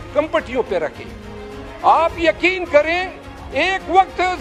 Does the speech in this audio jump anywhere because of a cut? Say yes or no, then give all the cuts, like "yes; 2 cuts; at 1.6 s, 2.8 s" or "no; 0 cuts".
no; 0 cuts